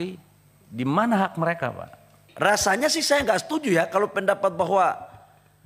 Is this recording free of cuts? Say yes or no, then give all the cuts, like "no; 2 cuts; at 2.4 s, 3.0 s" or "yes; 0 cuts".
no; 1 cut; at 2.2 s